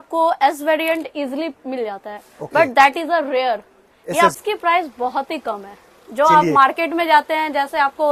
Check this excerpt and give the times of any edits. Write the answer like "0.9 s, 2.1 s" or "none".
4.3 s